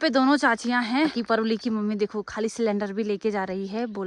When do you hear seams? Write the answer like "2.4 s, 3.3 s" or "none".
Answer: 1.1 s

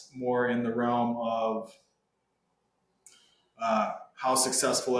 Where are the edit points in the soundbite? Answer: none

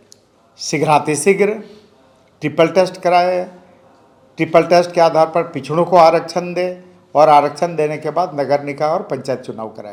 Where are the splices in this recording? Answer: none

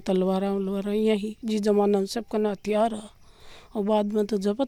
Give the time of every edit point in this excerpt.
none

